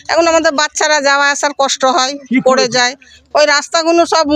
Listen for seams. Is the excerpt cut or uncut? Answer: uncut